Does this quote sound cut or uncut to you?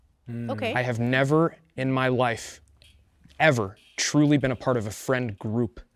uncut